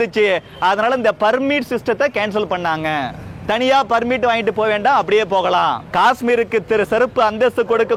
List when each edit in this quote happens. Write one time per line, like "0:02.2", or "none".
0:03.2
0:05.8